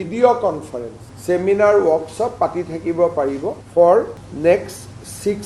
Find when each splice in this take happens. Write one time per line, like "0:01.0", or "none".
0:03.6